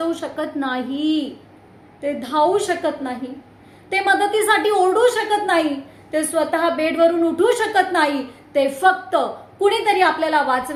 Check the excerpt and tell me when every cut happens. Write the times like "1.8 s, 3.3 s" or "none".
none

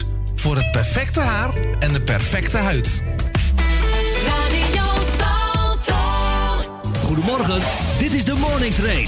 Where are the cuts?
none

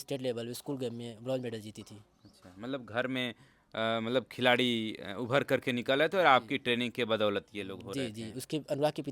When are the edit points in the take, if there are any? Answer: none

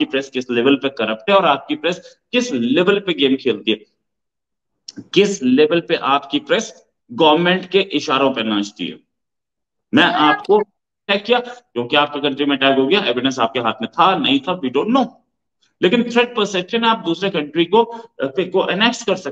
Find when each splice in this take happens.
11.1 s

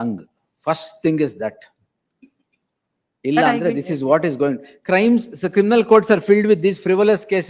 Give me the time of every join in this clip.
none

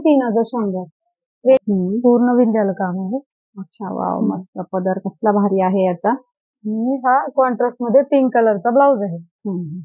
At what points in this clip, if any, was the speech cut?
1.6 s

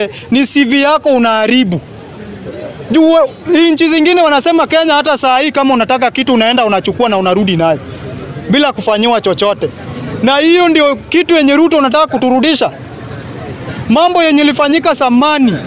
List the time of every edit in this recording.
none

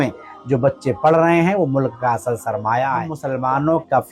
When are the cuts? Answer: 3.2 s

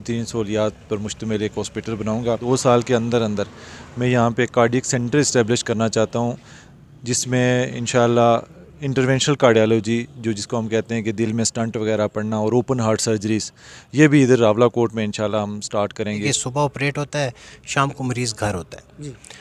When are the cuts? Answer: 2.4 s, 16.2 s

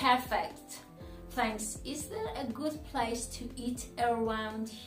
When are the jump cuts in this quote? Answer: none

